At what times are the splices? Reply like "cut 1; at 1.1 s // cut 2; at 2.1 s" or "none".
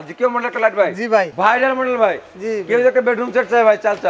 cut 1; at 1.3 s